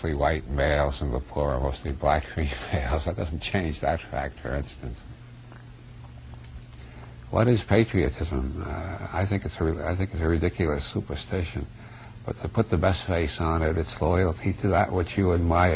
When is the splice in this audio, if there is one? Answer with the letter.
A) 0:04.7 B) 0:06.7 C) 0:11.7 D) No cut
C